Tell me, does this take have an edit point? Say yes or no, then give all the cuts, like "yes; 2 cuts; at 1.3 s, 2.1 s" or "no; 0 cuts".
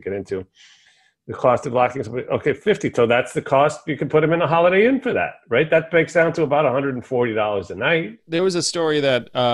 yes; 1 cut; at 8.2 s